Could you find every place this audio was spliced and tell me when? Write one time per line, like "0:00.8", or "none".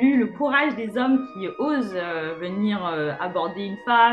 none